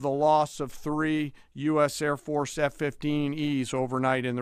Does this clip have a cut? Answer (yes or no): no